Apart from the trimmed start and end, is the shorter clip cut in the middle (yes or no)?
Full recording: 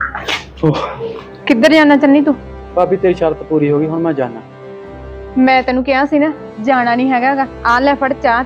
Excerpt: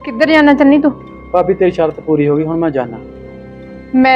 no